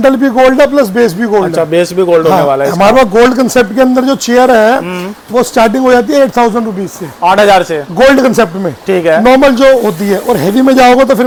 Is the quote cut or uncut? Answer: uncut